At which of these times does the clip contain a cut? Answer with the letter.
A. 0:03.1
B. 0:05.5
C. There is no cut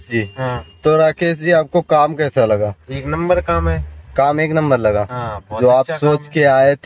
C